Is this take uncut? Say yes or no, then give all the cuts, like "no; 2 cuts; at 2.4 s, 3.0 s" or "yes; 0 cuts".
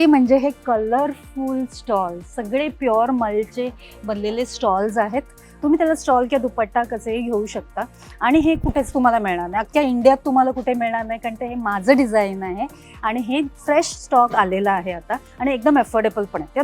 yes; 0 cuts